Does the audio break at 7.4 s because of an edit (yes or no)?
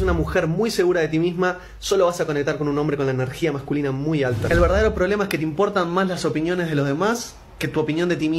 no